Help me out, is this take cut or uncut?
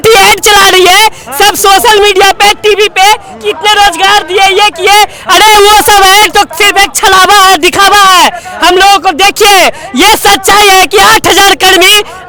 uncut